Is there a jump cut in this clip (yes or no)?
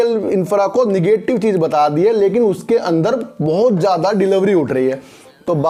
no